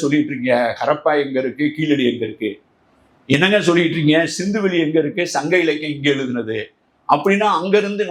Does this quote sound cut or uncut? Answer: uncut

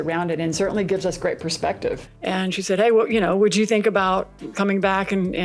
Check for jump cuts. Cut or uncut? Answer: cut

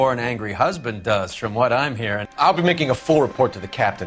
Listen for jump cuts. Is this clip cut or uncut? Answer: uncut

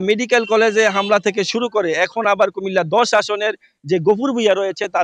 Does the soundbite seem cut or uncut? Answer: uncut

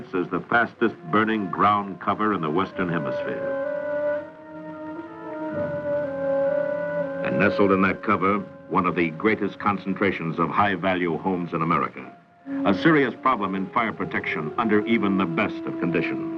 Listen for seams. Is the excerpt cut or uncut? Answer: cut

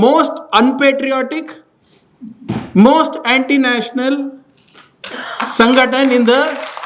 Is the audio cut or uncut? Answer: uncut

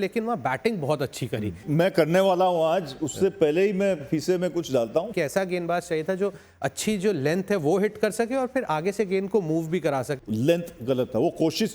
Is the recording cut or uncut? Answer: cut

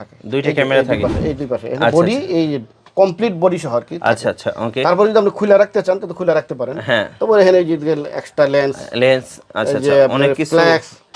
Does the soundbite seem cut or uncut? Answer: uncut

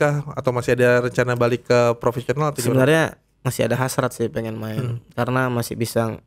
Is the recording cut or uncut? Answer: uncut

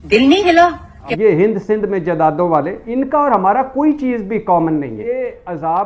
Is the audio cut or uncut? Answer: cut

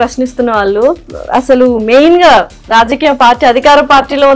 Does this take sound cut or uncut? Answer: uncut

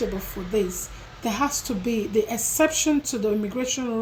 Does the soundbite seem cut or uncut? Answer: uncut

